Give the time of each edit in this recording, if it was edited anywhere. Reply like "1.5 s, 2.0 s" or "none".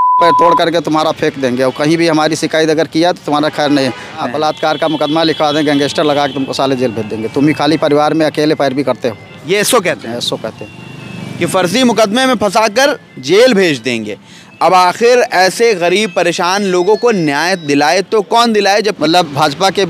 4.5 s, 18.9 s